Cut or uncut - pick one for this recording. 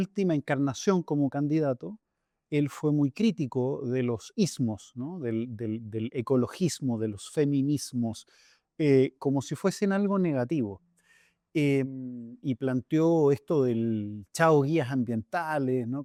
uncut